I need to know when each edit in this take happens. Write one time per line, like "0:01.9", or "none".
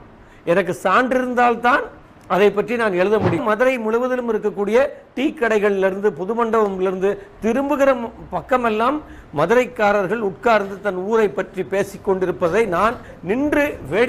0:03.4

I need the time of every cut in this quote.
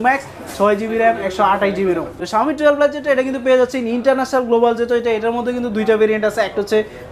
0:02.1

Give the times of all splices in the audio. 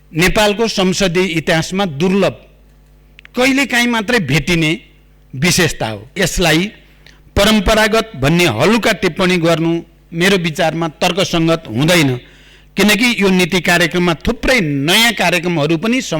0:06.2

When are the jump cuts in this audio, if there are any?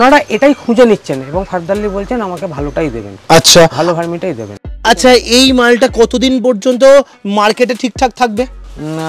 0:04.7

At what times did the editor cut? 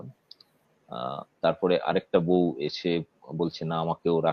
none

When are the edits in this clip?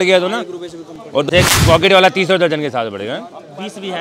0:01.3

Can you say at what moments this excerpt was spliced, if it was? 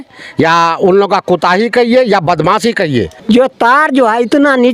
0:03.1

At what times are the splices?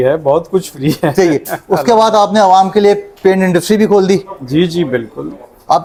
none

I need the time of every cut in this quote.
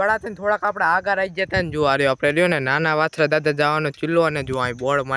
none

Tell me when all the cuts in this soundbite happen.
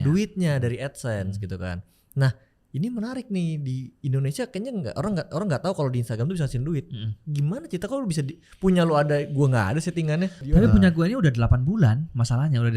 0:10.4

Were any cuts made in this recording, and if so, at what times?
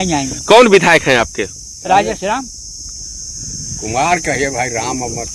none

